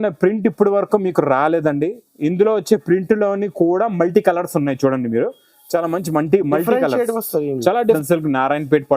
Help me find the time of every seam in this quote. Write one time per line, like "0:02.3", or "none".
0:08.0